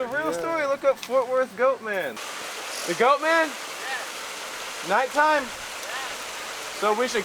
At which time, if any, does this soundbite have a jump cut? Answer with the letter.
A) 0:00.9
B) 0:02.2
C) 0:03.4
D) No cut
B